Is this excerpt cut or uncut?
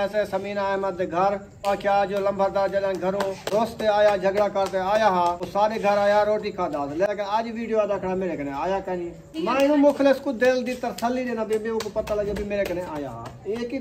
cut